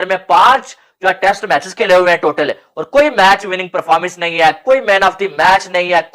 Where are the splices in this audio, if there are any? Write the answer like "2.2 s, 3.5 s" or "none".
none